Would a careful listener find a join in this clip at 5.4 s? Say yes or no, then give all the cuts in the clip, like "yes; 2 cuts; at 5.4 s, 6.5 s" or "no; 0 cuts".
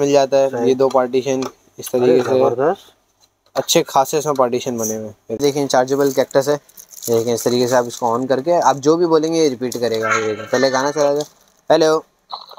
yes; 1 cut; at 5.4 s